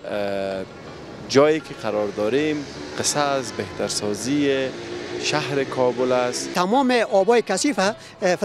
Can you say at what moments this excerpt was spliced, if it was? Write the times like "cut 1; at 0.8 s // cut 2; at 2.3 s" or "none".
cut 1; at 6.5 s